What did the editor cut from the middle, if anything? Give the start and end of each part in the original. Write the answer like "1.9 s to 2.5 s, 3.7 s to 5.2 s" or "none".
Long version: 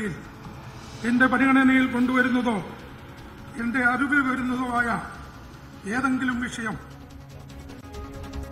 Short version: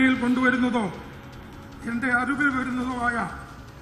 none